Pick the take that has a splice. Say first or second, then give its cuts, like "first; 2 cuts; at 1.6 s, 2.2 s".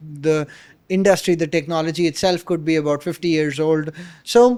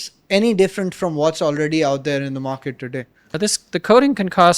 second; 1 cut; at 3.2 s